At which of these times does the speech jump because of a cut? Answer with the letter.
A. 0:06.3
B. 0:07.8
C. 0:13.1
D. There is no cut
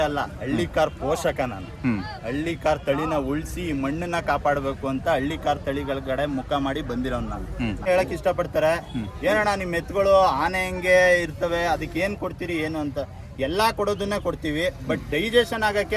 B